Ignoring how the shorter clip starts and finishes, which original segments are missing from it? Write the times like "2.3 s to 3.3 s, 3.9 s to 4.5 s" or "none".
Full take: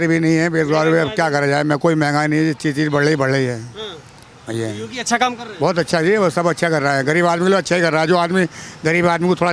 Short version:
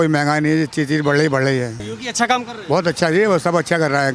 3.8 s to 4.8 s